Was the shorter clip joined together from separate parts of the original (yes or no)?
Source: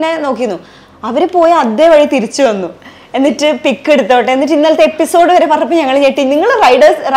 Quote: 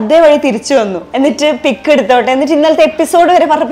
yes